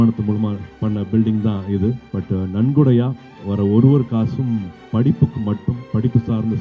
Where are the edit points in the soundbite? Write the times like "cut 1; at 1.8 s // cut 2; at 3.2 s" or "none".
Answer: none